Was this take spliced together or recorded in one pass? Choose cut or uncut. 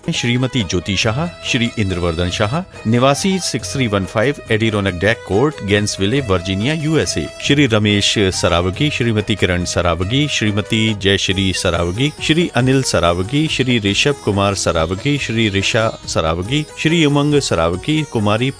uncut